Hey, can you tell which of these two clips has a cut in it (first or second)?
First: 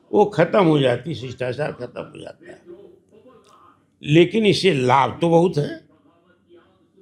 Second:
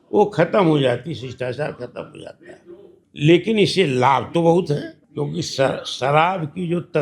second